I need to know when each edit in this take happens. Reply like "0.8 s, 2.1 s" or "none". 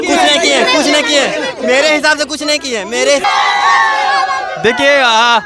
3.2 s